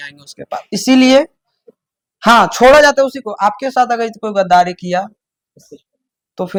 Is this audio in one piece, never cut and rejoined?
yes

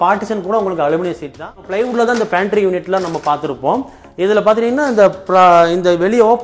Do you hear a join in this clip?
yes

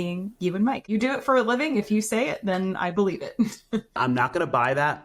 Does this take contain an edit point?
yes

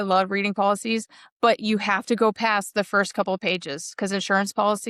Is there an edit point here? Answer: no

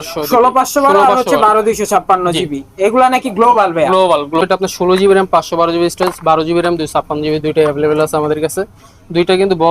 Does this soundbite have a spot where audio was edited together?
yes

